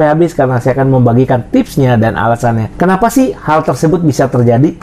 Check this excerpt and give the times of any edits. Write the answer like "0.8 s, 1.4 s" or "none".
2.7 s